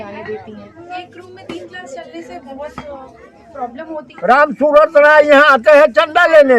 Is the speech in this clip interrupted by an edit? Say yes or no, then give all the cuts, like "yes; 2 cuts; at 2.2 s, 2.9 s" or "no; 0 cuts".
yes; 2 cuts; at 0.9 s, 4.2 s